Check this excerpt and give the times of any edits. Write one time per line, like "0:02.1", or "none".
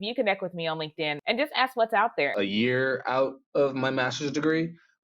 0:01.2
0:02.3